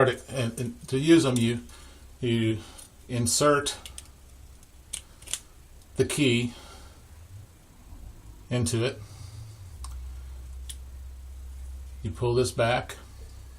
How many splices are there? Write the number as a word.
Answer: one